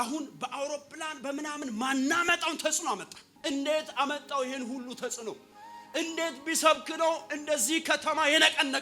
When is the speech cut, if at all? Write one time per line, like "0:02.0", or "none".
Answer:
0:03.3